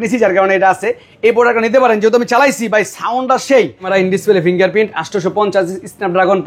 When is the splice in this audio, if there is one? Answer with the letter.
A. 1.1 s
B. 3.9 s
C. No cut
B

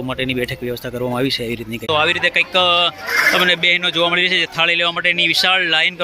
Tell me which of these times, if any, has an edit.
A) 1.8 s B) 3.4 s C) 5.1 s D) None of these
A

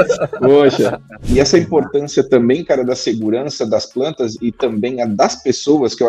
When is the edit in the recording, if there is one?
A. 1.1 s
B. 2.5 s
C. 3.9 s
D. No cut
A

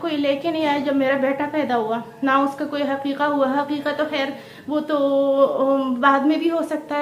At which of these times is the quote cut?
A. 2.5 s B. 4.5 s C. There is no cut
C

